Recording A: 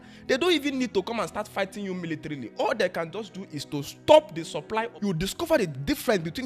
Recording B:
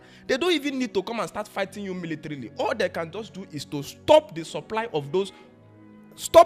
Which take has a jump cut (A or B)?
A